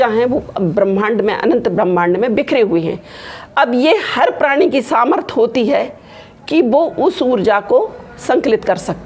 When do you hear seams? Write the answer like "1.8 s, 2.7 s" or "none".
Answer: none